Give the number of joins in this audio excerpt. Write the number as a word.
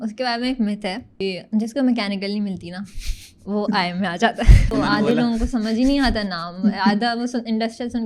two